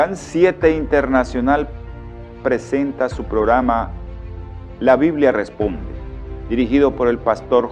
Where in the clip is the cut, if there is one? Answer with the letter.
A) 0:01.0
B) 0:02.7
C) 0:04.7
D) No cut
B